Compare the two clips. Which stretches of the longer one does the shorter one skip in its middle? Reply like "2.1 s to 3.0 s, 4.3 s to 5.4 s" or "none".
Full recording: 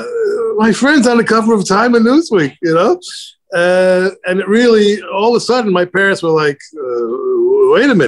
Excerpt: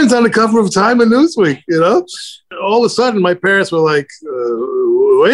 3.5 s to 5.0 s